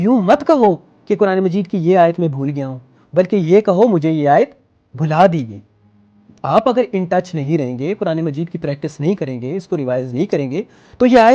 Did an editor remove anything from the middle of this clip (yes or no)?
no